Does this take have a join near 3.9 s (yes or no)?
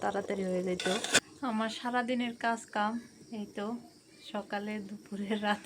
no